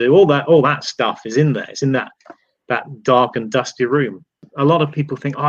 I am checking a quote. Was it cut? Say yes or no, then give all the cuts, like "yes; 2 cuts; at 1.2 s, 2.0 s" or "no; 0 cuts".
yes; 1 cut; at 4.5 s